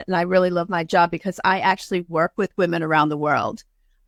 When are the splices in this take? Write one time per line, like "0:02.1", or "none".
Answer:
none